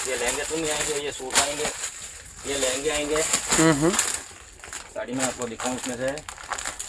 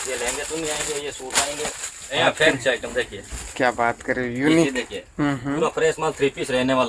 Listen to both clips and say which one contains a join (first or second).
second